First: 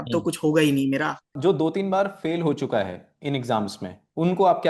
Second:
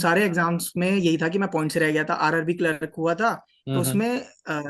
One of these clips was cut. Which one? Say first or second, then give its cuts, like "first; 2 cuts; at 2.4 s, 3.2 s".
first; 1 cut; at 1.3 s